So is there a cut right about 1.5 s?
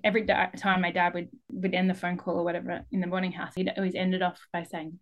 yes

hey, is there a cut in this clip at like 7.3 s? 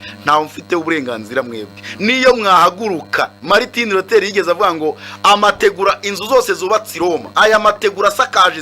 yes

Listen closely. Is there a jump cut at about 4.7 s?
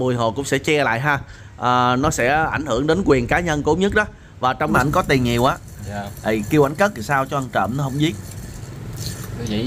yes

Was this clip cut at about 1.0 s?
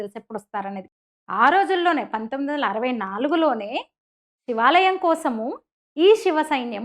yes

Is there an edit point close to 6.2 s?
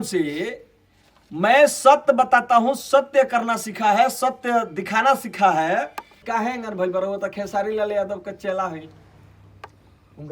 yes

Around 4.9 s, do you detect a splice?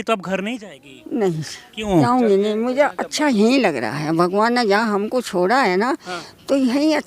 no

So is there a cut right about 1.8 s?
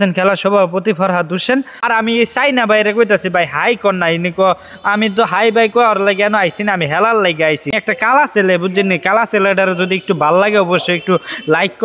yes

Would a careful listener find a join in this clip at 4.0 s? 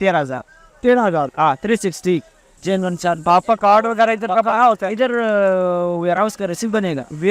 no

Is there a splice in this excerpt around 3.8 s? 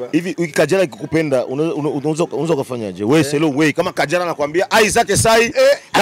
no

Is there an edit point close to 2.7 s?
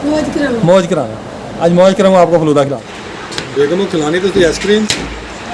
yes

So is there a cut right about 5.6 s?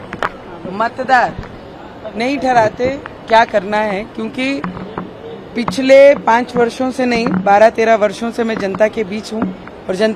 no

